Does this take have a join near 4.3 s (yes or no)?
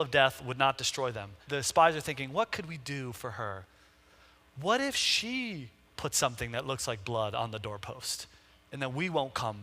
no